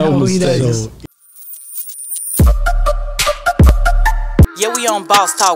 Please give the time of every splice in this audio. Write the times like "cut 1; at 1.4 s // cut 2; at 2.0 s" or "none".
cut 1; at 1.0 s